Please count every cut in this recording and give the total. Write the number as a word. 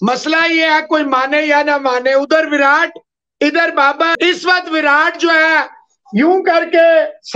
one